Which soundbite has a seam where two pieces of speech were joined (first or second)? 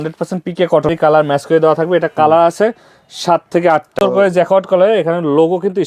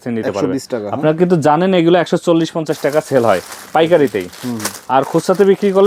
first